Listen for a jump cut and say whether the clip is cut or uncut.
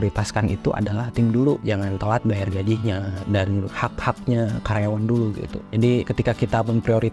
cut